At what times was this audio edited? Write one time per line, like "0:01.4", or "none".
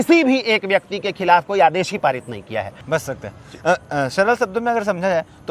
0:02.7